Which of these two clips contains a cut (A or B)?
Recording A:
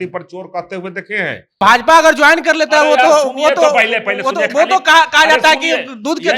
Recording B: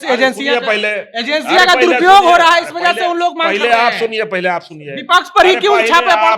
A